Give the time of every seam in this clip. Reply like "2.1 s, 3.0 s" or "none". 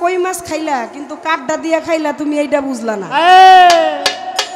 none